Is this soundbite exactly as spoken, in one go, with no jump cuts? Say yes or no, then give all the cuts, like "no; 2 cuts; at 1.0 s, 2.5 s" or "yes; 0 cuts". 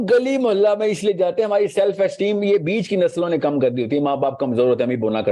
yes; 0 cuts